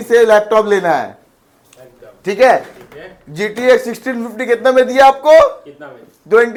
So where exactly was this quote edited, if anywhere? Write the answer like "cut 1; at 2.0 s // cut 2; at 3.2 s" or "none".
none